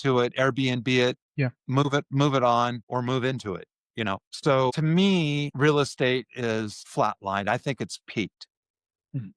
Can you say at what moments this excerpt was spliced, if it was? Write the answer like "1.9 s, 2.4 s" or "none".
1.3 s, 2.8 s, 4.3 s, 5.5 s, 6.8 s